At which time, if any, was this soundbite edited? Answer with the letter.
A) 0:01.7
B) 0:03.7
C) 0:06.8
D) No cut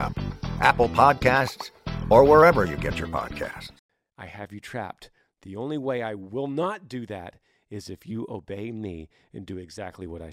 B